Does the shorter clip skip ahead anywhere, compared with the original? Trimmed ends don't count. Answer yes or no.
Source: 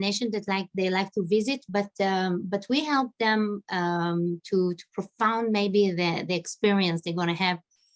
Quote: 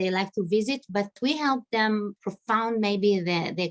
yes